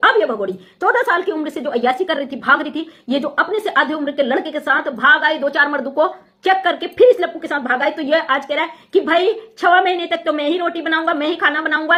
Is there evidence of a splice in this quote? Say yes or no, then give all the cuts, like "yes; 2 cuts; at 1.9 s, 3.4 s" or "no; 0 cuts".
no; 0 cuts